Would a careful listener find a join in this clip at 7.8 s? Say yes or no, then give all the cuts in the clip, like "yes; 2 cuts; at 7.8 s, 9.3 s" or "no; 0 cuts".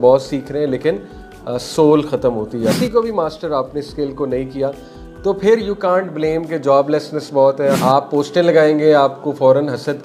yes; 2 cuts; at 2.8 s, 7.8 s